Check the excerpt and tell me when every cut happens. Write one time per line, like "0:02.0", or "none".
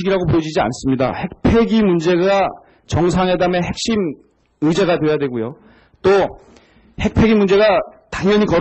0:01.8